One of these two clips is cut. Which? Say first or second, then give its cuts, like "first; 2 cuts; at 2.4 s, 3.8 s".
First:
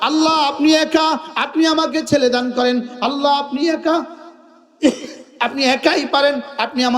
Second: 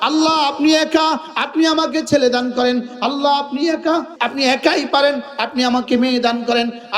second; 1 cut; at 4.1 s